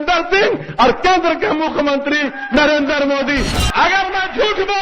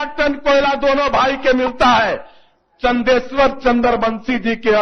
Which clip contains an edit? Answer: first; 1 cut; at 3.5 s

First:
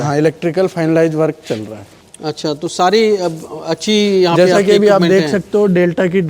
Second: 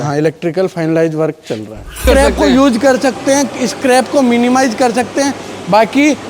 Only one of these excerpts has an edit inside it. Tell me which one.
second; 1 cut; at 2.0 s

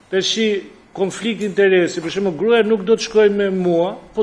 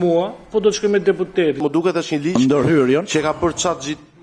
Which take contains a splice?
second; 1 cut; at 1.6 s

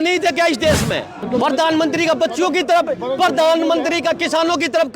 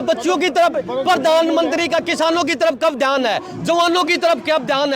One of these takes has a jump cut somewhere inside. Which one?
first; 1 cut; at 1.2 s

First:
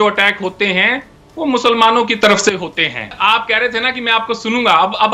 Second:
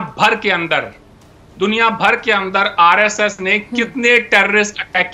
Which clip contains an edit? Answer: first; 1 cut; at 3.1 s

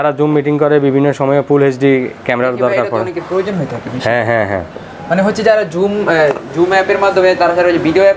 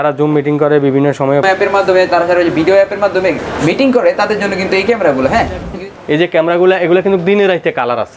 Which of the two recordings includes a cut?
second; 3 cuts; at 1.4 s, 3.5 s, 5.7 s

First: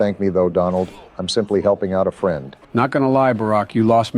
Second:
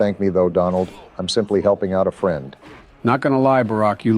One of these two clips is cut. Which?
first; 1 cut; at 2.5 s

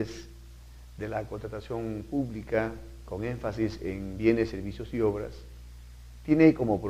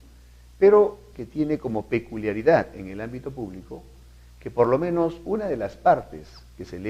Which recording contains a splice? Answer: second; 1 cut; at 3.0 s

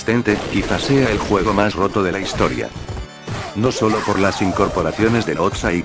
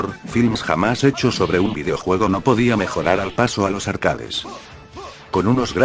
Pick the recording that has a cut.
second; 1 cut; at 2.4 s

